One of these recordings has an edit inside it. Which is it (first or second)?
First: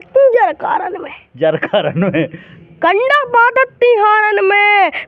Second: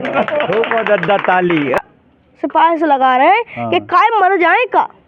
second